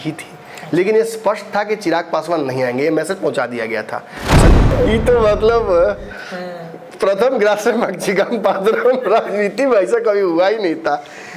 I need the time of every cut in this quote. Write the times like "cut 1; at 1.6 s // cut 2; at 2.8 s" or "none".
cut 1; at 4.5 s

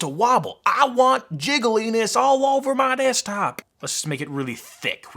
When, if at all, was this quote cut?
cut 1; at 3.7 s

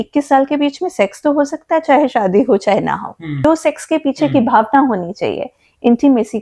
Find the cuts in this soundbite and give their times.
cut 1; at 3.4 s

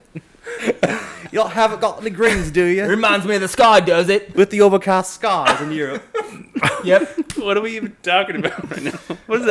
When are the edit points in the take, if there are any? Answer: cut 1; at 4.3 s

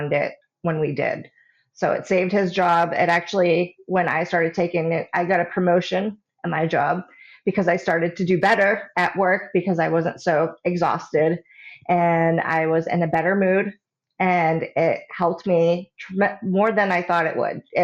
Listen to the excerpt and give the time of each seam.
none

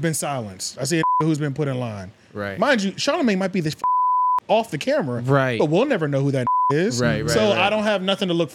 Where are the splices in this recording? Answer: none

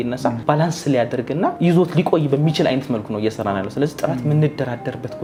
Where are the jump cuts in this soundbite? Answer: none

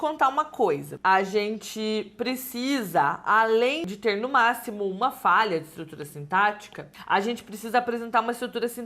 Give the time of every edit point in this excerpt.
cut 1; at 0.9 s

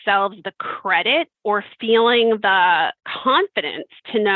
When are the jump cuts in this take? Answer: cut 1; at 3.1 s

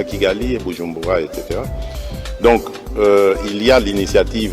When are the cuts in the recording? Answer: cut 1; at 1.9 s

